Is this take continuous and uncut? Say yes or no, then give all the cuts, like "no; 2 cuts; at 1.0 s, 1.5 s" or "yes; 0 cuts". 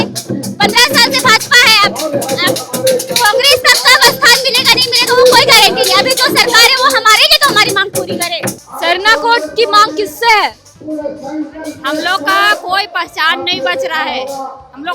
no; 1 cut; at 8.6 s